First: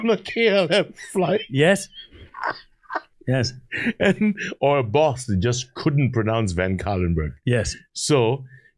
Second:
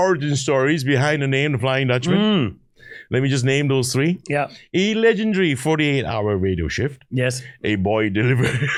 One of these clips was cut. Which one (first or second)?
first